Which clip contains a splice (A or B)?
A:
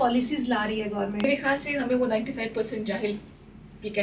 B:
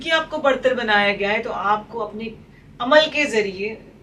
A